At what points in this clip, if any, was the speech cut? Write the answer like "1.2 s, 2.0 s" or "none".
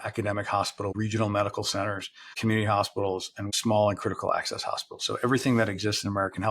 0.9 s, 2.4 s, 3.5 s